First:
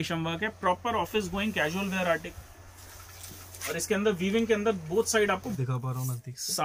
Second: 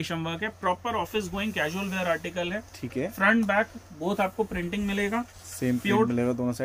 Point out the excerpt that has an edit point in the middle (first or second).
first